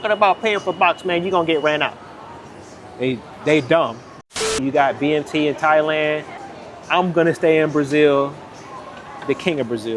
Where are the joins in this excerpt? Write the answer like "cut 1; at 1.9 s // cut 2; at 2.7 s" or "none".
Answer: cut 1; at 4.6 s // cut 2; at 6.3 s